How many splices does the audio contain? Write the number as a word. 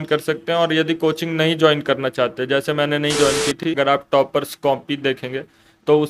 one